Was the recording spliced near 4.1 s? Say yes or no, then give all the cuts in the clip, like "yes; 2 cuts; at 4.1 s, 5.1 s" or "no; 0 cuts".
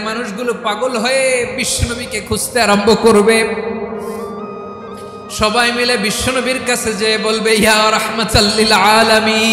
no; 0 cuts